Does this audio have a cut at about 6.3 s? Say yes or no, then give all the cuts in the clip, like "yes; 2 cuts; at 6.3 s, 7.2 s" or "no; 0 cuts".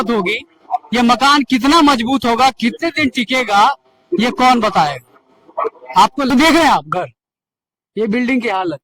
yes; 1 cut; at 6.3 s